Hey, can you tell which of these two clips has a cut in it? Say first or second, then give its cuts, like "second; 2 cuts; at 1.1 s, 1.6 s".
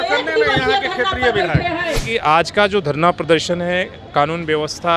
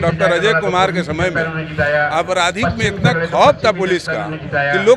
first; 1 cut; at 2.1 s